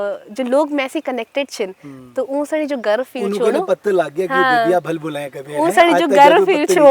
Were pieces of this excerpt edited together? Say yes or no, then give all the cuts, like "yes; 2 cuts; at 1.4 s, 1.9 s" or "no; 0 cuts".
no; 0 cuts